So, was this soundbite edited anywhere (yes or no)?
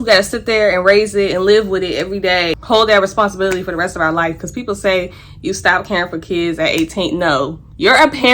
yes